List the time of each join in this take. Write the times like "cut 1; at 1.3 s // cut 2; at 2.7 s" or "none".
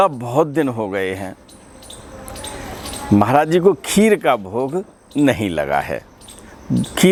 none